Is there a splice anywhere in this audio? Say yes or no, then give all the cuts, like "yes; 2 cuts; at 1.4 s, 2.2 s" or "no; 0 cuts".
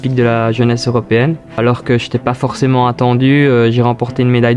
no; 0 cuts